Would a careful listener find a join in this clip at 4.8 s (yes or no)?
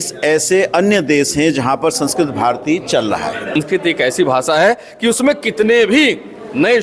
no